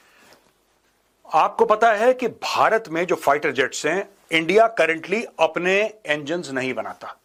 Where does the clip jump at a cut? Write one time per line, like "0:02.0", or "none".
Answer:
none